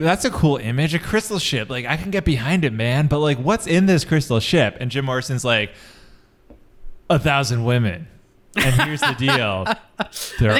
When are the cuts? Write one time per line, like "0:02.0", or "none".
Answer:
none